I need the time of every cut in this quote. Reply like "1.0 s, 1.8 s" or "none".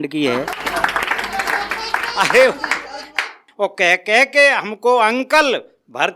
3.5 s

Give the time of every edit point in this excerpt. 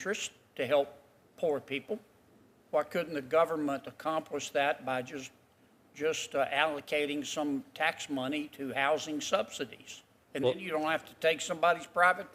none

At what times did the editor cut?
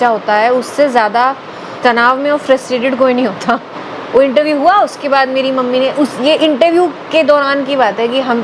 1.7 s, 3.8 s

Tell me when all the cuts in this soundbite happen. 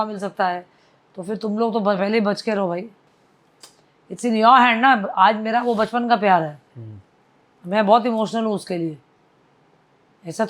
none

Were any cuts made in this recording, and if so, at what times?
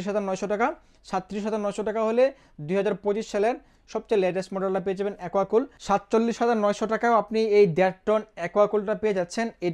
5.8 s

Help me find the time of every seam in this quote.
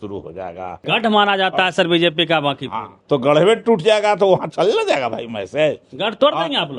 0.8 s, 2.9 s

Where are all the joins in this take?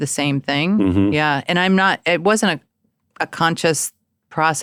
none

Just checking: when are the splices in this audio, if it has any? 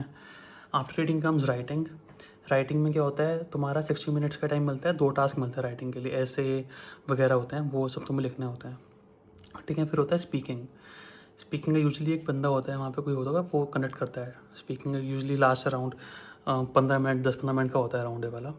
none

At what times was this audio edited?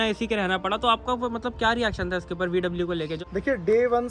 3.2 s

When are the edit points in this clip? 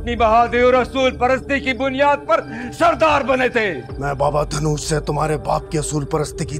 none

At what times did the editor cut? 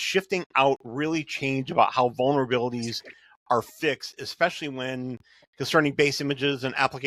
none

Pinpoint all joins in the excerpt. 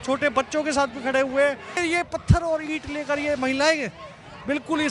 1.8 s

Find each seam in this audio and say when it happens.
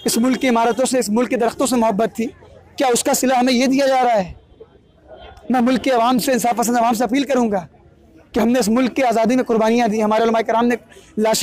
none

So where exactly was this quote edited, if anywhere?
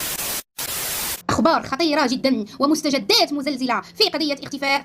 1.2 s

